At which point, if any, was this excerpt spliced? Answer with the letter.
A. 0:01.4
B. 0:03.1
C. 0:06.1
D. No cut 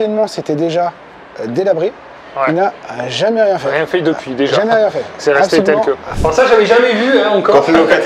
C